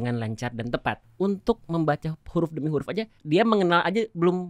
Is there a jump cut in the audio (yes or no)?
yes